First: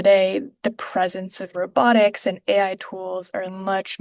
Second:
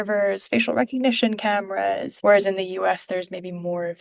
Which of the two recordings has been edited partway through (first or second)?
second